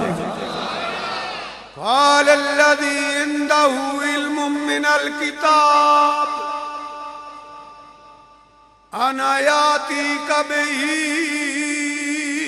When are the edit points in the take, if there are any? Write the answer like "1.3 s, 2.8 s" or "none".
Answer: 1.6 s